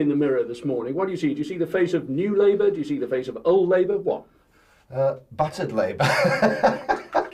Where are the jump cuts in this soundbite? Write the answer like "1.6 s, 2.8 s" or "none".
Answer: none